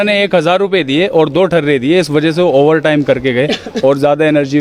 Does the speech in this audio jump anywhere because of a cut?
no; 0 cuts

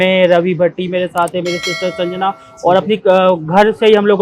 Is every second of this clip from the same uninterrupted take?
yes; 0 cuts

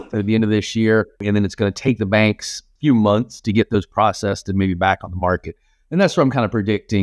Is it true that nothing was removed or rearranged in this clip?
no; 1 cut; at 1.2 s

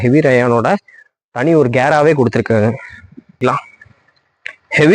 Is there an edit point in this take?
yes; 1 cut; at 3.4 s

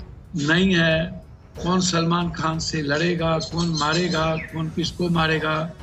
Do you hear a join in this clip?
no; 0 cuts

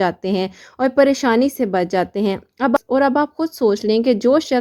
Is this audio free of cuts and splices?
yes; 0 cuts

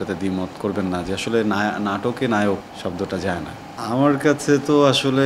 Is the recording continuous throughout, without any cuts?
no; 2 cuts; at 2.7 s, 3.6 s

